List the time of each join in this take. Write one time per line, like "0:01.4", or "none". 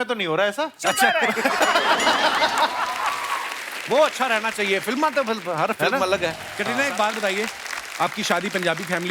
0:06.5